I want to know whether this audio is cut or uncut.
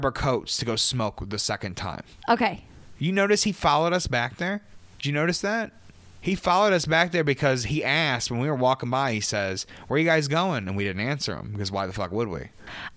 uncut